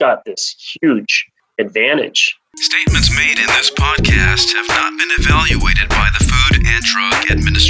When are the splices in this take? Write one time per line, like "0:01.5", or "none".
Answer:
0:02.4